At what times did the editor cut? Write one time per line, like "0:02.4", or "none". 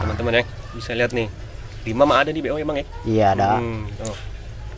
none

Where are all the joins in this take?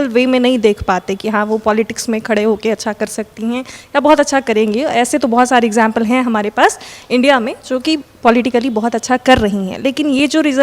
none

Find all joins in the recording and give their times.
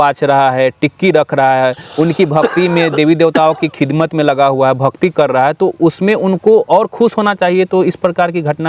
none

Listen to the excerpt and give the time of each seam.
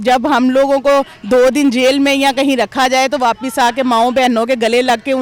none

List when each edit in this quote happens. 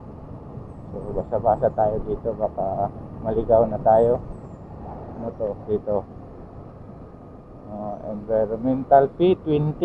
none

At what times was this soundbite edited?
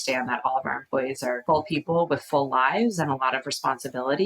0:01.4

